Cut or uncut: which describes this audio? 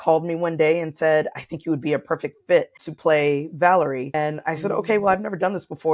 cut